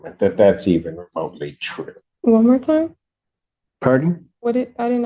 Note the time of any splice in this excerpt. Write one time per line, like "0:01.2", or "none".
0:02.1

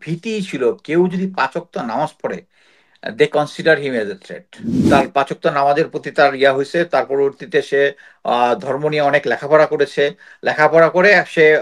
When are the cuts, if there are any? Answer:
0:04.7

